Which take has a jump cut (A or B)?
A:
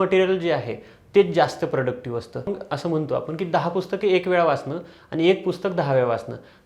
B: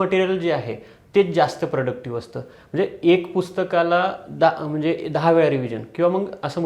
A